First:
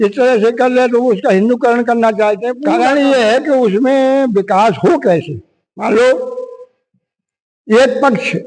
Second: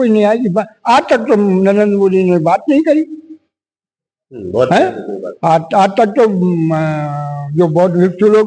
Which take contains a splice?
first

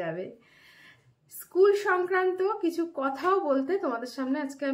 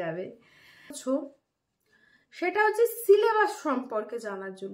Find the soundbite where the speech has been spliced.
second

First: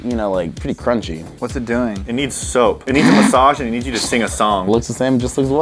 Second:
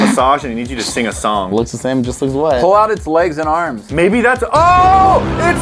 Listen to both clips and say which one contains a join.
first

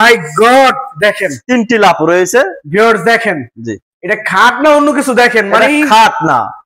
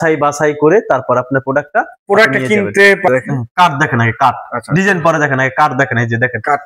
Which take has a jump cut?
second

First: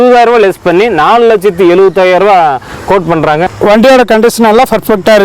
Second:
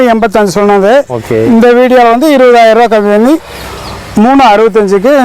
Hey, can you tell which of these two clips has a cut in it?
first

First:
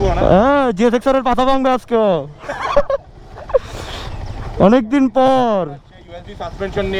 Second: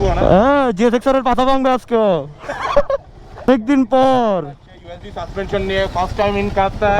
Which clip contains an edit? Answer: second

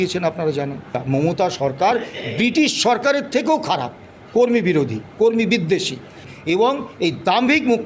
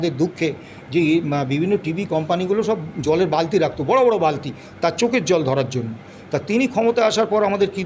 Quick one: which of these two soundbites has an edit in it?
first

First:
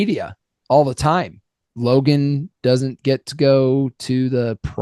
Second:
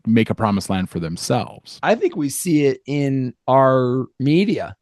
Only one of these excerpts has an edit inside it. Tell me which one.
second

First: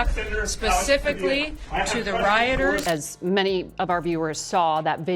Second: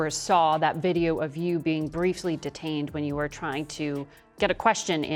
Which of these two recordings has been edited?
first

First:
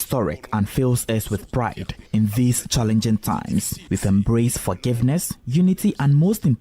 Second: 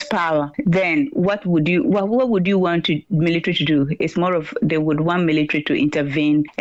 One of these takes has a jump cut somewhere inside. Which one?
first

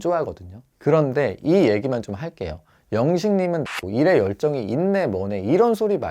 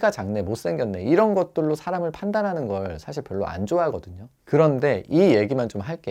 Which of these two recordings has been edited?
first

